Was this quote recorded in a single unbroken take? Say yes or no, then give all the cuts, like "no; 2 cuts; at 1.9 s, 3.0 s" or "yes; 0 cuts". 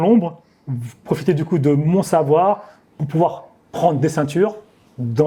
yes; 0 cuts